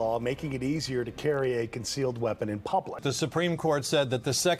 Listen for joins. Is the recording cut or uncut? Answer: cut